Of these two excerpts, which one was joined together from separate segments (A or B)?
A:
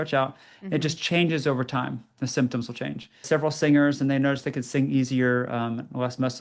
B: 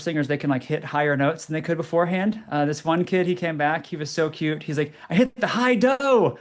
A